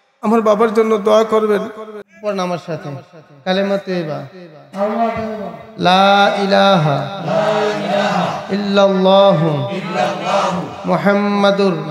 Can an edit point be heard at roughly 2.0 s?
yes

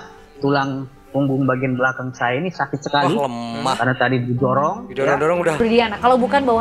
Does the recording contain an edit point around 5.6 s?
yes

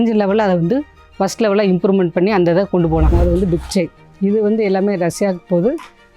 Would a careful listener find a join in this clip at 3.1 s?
yes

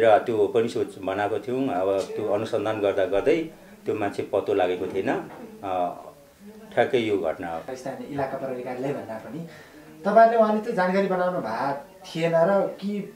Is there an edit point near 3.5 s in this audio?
no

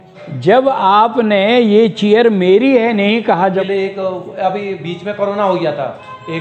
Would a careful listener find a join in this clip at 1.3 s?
no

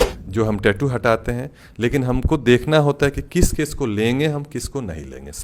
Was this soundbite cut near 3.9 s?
no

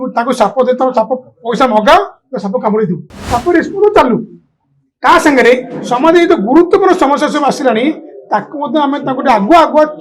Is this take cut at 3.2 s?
yes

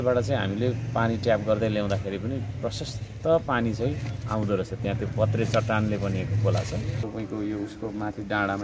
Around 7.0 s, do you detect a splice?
yes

